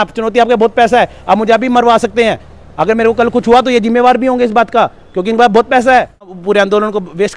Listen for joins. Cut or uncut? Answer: cut